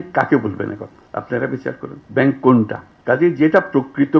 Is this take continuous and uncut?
no; 3 cuts; at 1.0 s, 2.0 s, 2.9 s

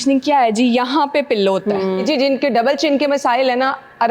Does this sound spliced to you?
yes; 1 cut; at 2.0 s

